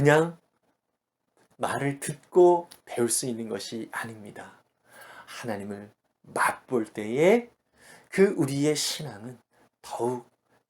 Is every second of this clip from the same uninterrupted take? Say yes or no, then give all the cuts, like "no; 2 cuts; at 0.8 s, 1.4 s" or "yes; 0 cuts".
no; 1 cut; at 1.5 s